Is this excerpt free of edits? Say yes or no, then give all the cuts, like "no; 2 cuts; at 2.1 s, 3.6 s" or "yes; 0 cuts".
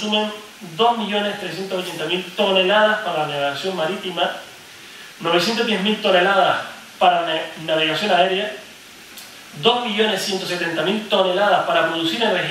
yes; 0 cuts